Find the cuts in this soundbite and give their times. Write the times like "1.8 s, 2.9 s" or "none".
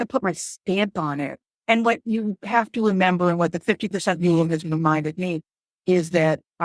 1.5 s